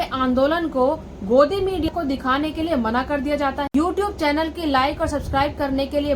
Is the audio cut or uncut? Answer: cut